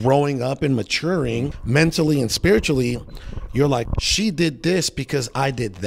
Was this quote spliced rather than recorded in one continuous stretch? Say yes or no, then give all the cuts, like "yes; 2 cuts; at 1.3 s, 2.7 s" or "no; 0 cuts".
yes; 2 cuts; at 1.5 s, 3.9 s